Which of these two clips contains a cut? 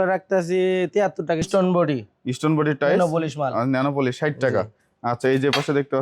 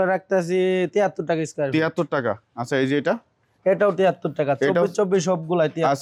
first; 1 cut; at 1.5 s

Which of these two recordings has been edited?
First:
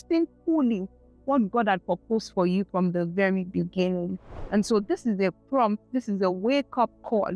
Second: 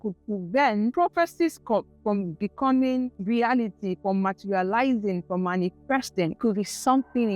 second; 3 cuts; at 0.9 s, 3.2 s, 6.3 s

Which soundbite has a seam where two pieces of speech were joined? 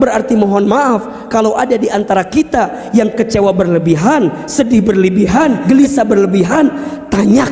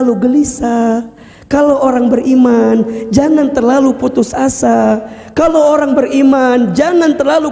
first; 1 cut; at 5.6 s

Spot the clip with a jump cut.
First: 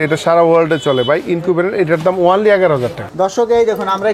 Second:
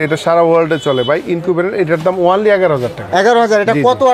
first; 1 cut; at 3.0 s

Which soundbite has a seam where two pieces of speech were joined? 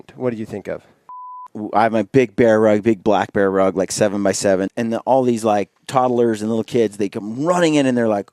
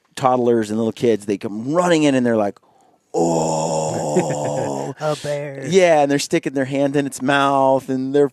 first; 2 cuts; at 1.5 s, 4.7 s

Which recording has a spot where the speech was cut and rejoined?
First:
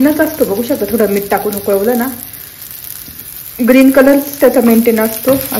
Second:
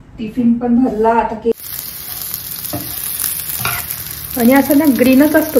second; 1 cut; at 1.5 s

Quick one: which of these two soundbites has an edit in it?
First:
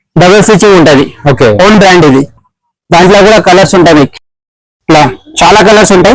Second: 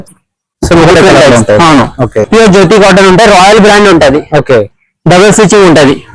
second; 1 cut; at 2.2 s

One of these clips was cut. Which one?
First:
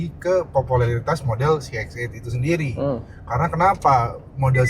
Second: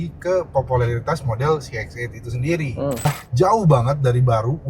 second; 1 cut; at 3.2 s

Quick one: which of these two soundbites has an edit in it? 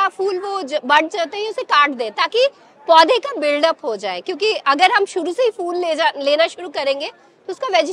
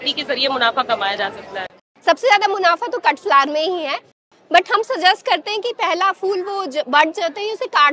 second; 2 cuts; at 1.8 s, 4.2 s

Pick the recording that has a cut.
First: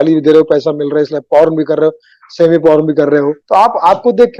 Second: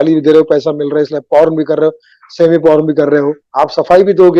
second; 1 cut; at 3.4 s

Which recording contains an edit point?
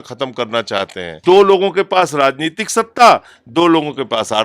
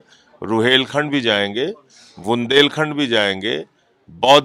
first; 1 cut; at 1.1 s

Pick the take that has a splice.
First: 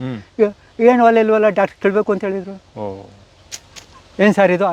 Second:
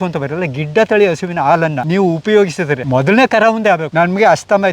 second; 3 cuts; at 1.8 s, 2.8 s, 3.9 s

